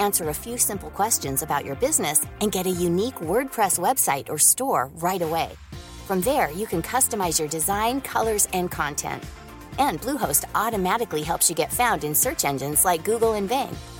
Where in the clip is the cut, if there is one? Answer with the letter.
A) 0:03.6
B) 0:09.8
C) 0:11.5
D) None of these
D